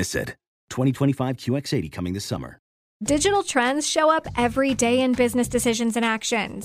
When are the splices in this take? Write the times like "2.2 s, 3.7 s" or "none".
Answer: 2.8 s

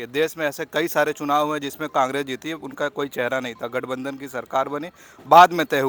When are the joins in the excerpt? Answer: none

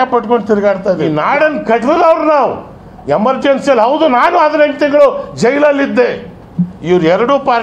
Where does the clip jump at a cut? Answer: 1.1 s

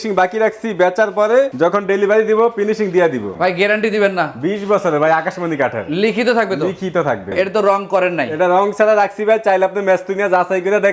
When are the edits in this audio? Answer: 1.5 s, 3.3 s, 7.3 s

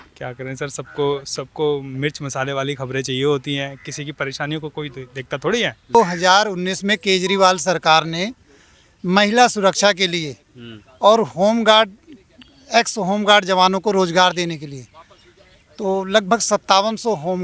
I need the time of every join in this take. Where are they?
5.9 s

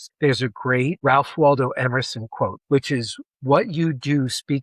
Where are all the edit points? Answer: 1.0 s, 2.6 s

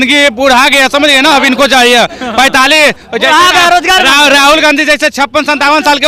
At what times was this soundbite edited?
none

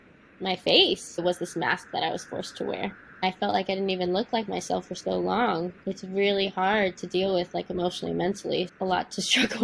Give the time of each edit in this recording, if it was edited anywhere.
1.2 s, 3.2 s, 5.7 s, 8.7 s

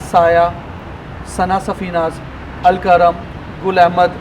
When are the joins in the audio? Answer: none

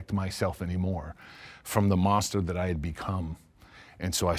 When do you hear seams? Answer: none

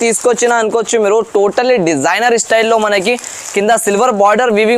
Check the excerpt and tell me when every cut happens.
none

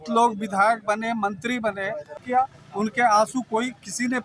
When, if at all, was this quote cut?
2.4 s

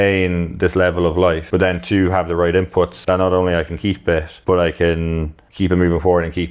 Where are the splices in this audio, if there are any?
1.4 s, 3.0 s, 4.3 s, 5.4 s

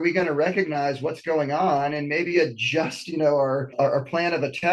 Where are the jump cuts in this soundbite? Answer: 3.7 s

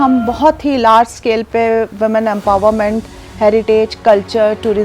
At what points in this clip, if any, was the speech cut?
none

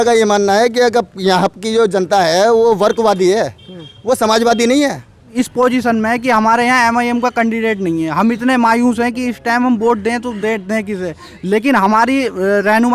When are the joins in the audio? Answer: 5.3 s

